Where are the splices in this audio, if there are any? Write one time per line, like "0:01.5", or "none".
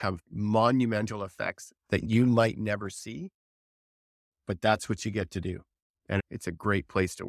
none